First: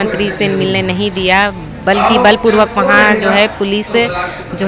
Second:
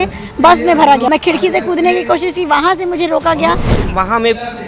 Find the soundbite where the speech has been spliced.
second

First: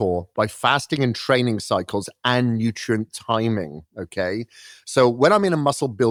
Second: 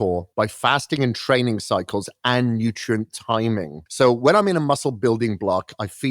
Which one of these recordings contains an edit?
second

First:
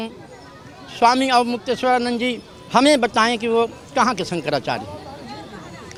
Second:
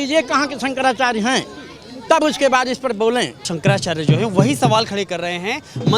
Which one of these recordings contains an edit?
second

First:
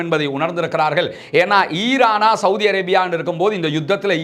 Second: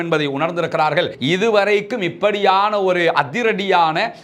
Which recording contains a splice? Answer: second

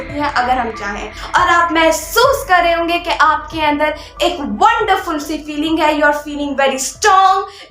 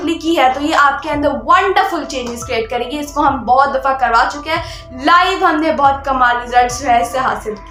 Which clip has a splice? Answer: first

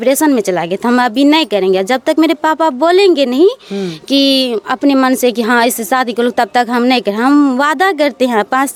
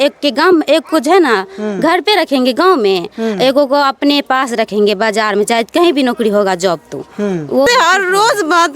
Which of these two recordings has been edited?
second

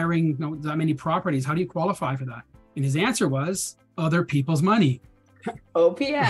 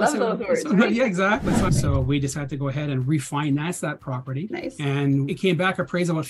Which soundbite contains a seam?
second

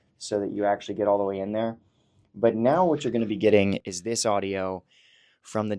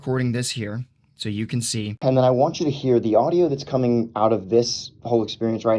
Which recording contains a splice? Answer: second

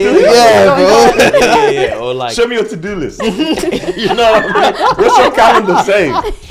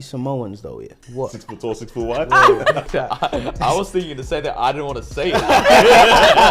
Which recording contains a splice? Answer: second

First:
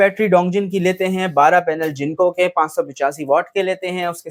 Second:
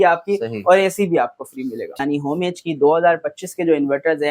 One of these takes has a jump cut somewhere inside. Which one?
second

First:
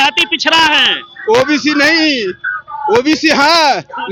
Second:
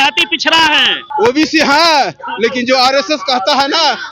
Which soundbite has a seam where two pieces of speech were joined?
second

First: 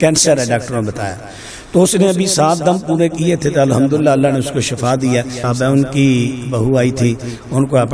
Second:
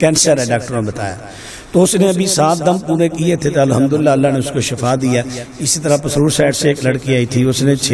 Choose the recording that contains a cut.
first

